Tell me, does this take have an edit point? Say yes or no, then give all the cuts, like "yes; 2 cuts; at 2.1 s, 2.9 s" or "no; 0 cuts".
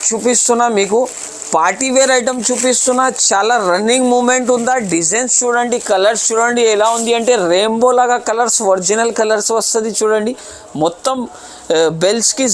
no; 0 cuts